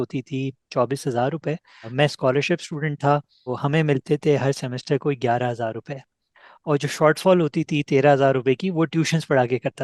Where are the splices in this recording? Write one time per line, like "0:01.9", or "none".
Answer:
0:01.9
0:03.5